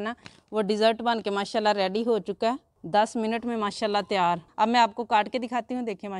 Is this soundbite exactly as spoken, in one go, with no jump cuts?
no; 2 cuts; at 2.7 s, 4.5 s

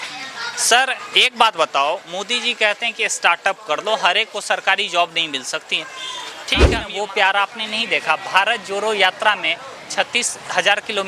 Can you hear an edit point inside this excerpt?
yes; 1 cut; at 6.7 s

